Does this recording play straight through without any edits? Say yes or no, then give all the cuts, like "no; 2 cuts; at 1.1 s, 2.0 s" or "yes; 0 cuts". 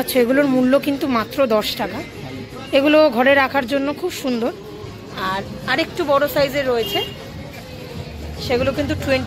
yes; 0 cuts